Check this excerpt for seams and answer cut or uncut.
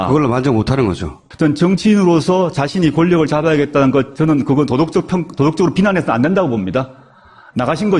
uncut